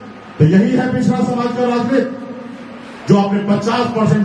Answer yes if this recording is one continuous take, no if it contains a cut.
yes